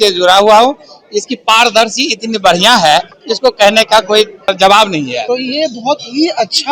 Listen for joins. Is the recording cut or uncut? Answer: cut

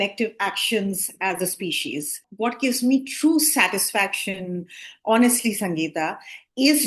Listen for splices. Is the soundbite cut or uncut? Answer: cut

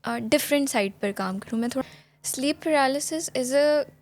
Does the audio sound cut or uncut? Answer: cut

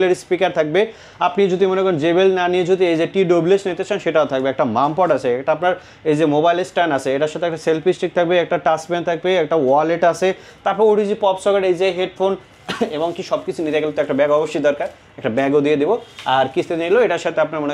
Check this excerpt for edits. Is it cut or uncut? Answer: uncut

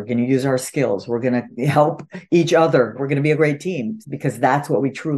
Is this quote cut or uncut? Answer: cut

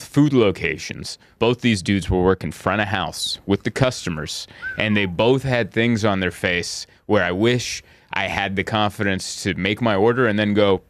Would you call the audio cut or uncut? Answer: cut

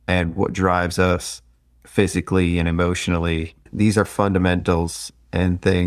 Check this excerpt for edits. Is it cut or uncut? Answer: cut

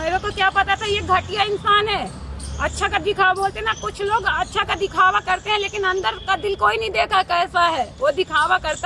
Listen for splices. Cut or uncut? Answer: uncut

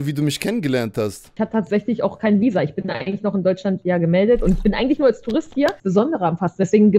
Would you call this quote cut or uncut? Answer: cut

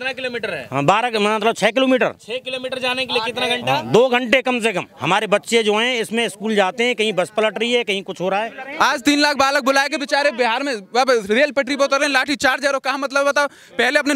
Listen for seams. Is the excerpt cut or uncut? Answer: cut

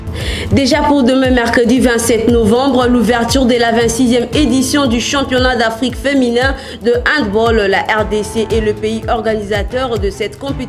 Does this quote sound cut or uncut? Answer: uncut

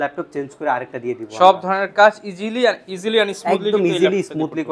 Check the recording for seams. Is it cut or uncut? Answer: uncut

